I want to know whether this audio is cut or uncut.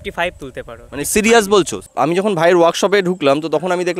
cut